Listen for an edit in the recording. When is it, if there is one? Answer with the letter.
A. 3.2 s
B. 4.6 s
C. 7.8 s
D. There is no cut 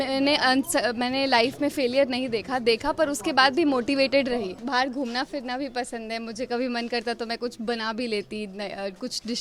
B